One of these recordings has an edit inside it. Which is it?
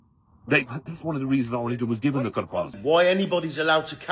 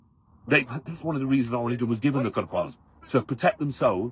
first; 1 cut; at 2.8 s

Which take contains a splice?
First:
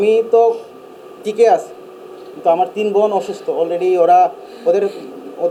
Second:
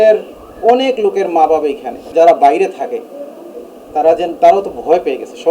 second; 1 cut; at 2.0 s

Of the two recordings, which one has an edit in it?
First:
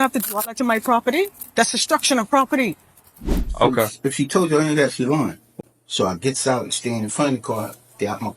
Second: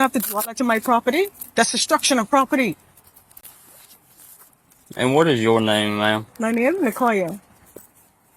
first; 2 cuts; at 3.5 s, 5.5 s

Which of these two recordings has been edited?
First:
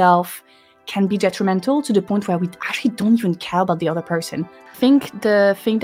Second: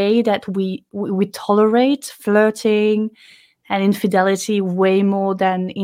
first; 1 cut; at 4.6 s

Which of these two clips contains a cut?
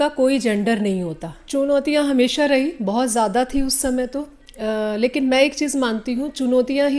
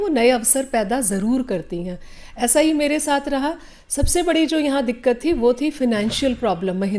first; 1 cut; at 1.3 s

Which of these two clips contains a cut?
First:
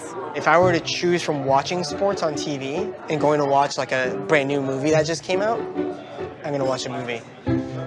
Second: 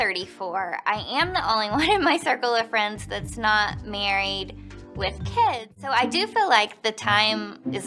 second; 1 cut; at 5.9 s

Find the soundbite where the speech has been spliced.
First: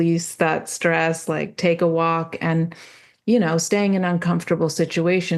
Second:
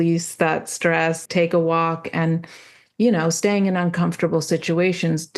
second; 1 cut; at 1.2 s

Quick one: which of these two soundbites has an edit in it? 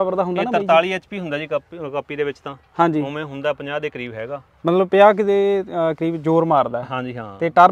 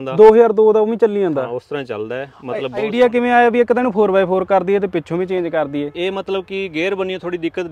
second; 1 cut; at 2.9 s

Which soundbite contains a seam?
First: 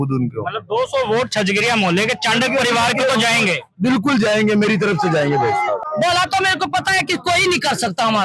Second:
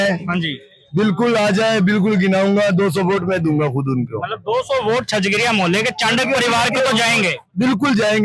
first; 1 cut; at 5.8 s

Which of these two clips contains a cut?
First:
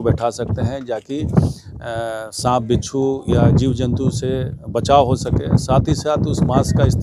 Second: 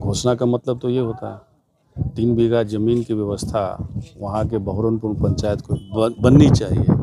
second; 1 cut; at 5.7 s

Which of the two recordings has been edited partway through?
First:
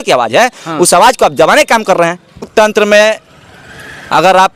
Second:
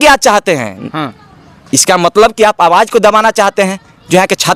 first; 1 cut; at 2.4 s

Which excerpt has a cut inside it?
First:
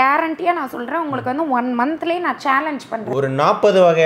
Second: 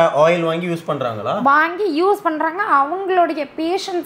first; 1 cut; at 3.1 s

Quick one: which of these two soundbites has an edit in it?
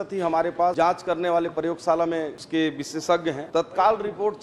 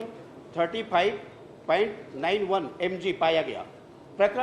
first; 3 cuts; at 0.7 s, 2.4 s, 3.4 s

